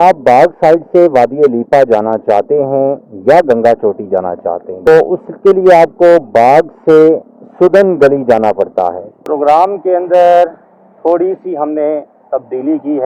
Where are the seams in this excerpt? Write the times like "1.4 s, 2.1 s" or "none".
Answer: 4.9 s, 9.0 s